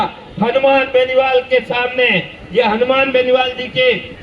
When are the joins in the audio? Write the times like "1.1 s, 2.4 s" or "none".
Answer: none